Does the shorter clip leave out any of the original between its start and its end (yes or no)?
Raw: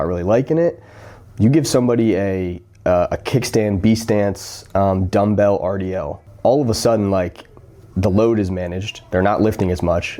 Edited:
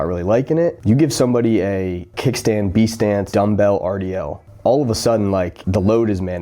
yes